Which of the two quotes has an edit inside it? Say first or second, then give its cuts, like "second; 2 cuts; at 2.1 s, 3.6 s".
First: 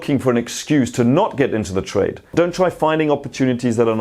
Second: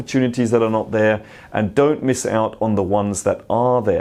first; 1 cut; at 2.2 s